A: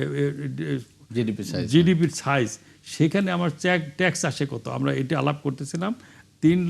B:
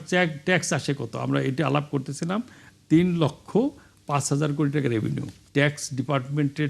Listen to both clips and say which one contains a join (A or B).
B